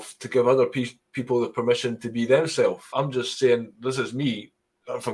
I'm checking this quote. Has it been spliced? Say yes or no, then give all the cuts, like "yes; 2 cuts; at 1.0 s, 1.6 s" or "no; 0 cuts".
yes; 1 cut; at 2.9 s